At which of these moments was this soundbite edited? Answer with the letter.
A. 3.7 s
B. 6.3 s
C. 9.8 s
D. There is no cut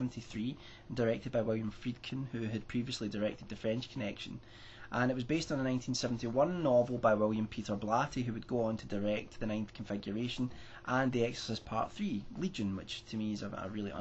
C